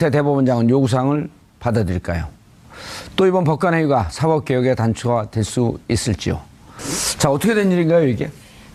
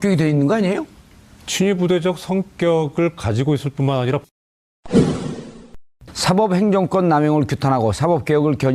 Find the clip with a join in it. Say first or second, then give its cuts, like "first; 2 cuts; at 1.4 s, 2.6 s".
second; 1 cut; at 4.2 s